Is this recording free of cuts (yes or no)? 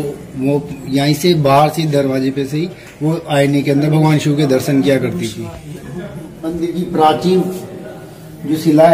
no